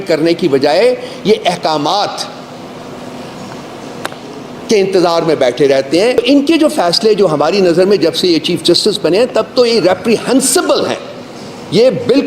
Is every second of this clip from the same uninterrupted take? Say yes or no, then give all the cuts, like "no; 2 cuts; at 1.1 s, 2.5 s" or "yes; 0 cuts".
no; 1 cut; at 6.2 s